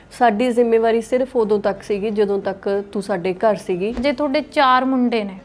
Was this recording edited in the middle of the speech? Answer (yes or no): yes